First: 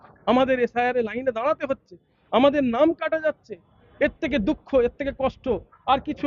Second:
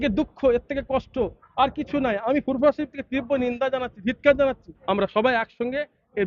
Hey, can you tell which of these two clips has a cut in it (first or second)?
second